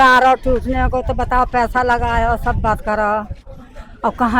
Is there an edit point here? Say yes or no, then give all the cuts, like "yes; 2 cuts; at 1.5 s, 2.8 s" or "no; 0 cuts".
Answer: no; 0 cuts